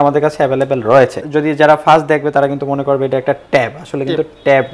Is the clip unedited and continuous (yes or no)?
no